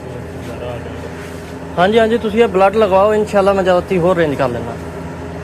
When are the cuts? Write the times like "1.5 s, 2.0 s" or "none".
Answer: none